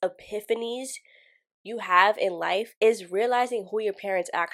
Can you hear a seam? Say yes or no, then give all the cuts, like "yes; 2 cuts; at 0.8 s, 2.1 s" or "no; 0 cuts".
no; 0 cuts